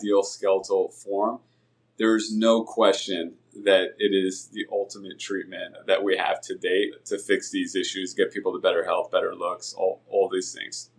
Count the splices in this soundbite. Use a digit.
2